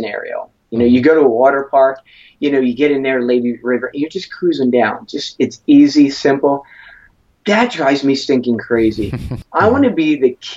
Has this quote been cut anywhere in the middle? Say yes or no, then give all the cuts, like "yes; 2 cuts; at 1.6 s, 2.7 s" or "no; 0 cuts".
yes; 1 cut; at 9.3 s